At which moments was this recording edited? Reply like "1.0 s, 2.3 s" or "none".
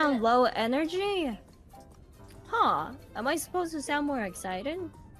none